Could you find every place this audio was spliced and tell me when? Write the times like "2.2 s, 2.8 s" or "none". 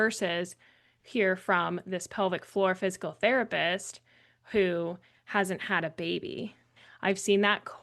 6.8 s